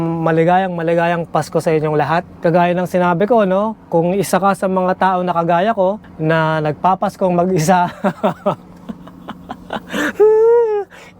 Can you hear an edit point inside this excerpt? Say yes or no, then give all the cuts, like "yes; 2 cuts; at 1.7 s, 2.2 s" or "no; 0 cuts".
yes; 1 cut; at 2.4 s